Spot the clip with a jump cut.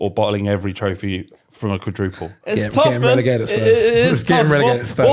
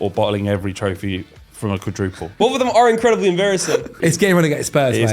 second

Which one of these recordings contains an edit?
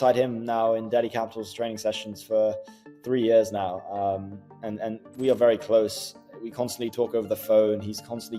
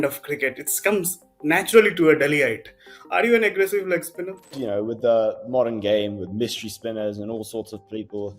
second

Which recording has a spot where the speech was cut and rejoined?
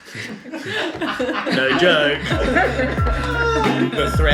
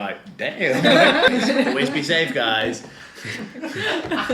second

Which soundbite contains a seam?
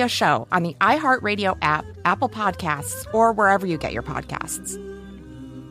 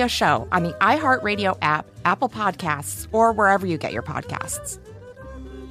first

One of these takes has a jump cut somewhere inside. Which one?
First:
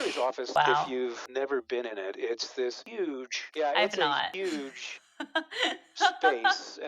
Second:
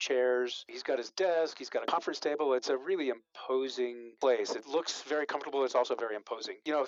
first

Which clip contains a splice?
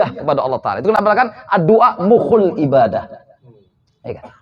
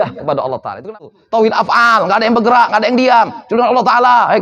second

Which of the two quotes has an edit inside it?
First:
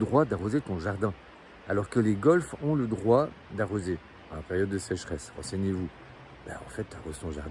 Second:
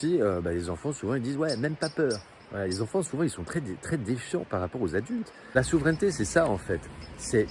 second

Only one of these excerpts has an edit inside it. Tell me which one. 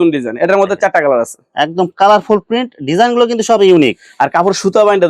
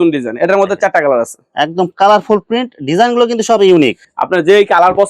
second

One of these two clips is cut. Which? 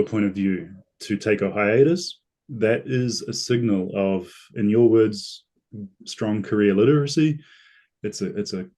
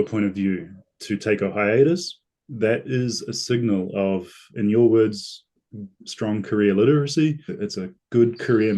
second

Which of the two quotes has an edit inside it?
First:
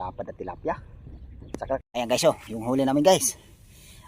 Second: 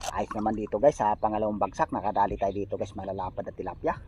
first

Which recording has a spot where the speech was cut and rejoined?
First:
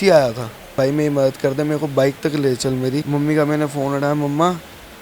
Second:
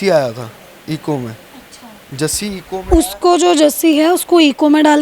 first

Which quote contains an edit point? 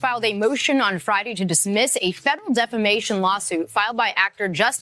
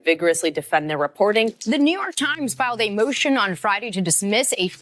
second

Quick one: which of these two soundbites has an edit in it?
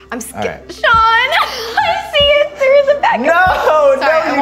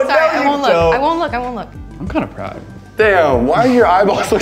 second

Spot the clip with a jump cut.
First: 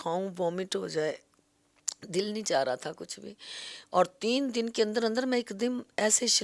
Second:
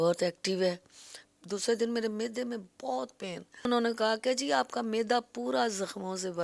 second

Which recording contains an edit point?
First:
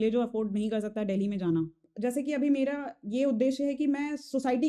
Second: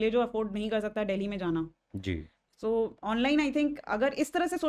first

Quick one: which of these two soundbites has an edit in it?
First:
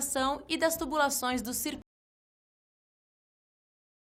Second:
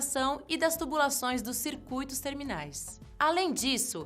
second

